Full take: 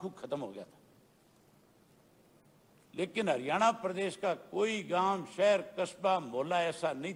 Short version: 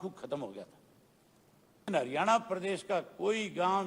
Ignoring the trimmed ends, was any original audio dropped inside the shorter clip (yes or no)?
yes